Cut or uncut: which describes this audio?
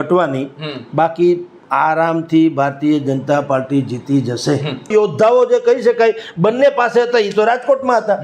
cut